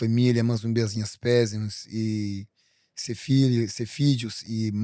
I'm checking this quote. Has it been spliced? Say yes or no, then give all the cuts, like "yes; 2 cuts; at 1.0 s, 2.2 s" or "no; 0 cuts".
no; 0 cuts